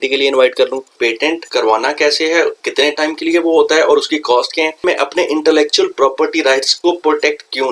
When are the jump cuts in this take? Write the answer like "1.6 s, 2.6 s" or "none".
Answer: 1.1 s, 2.6 s, 4.8 s, 6.7 s

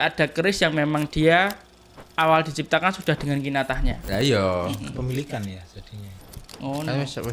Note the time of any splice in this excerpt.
4.0 s

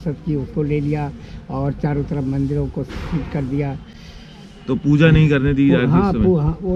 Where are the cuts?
none

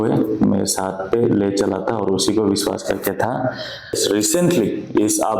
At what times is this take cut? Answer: 4.0 s

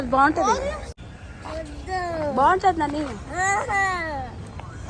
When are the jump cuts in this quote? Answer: 0.9 s

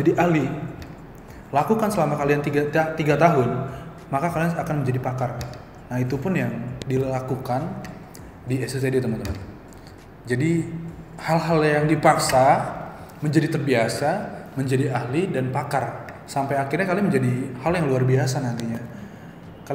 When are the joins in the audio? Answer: none

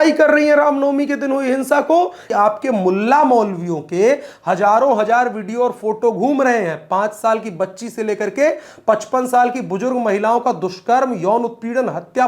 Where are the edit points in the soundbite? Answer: 2.2 s

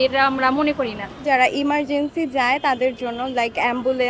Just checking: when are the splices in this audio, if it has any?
1.2 s

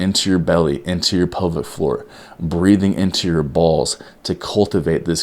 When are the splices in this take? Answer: none

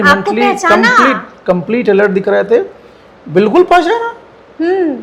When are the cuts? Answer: none

